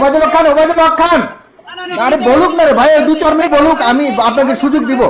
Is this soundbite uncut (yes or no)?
no